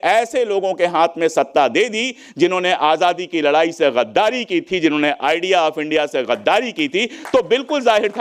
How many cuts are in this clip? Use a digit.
0